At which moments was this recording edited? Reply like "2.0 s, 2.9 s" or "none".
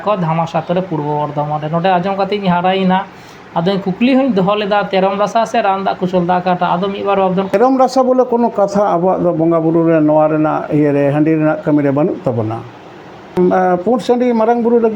7.5 s, 13.4 s